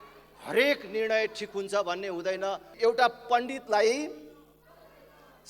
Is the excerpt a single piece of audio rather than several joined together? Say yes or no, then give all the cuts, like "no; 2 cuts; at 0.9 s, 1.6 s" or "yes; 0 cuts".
no; 1 cut; at 2.7 s